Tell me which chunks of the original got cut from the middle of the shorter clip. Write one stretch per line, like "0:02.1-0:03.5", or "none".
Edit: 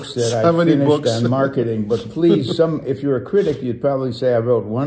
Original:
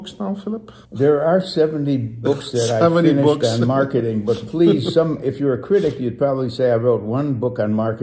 none